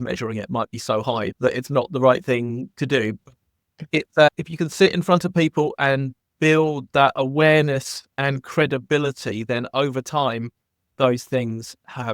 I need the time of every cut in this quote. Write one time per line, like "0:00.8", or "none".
none